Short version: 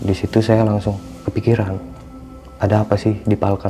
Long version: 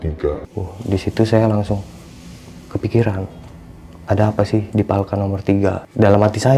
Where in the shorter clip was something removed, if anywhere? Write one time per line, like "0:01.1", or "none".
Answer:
0:01.1